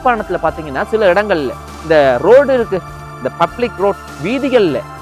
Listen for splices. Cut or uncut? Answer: uncut